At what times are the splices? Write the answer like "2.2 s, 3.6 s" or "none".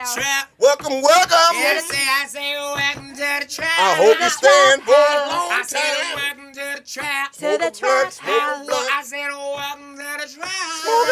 none